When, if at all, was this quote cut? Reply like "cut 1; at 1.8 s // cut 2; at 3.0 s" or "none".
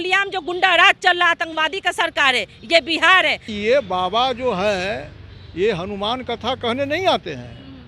cut 1; at 3.5 s